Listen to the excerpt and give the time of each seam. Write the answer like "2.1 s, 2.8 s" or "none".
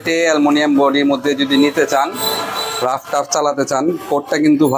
none